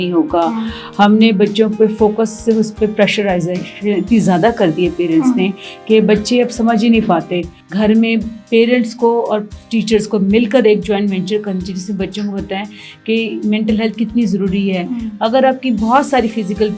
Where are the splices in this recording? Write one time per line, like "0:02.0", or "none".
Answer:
0:07.6